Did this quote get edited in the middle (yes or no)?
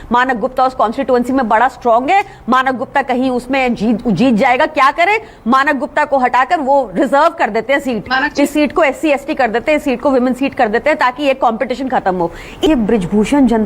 yes